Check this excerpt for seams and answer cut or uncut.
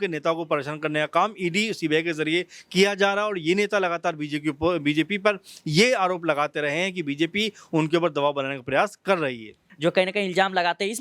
cut